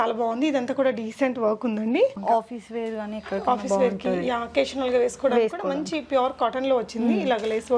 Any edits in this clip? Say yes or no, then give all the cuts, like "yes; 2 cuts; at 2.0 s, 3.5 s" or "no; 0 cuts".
yes; 1 cut; at 2.2 s